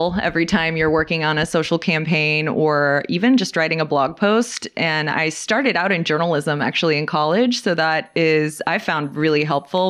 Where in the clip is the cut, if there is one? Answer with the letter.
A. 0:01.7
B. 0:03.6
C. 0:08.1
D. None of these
D